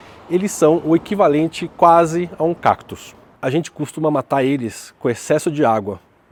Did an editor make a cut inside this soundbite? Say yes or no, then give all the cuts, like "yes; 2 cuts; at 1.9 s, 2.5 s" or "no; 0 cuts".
no; 0 cuts